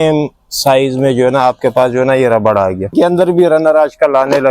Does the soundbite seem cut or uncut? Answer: cut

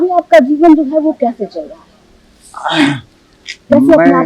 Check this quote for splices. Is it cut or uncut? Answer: uncut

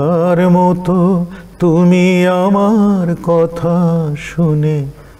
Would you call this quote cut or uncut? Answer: uncut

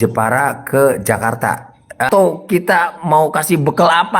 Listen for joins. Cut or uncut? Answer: cut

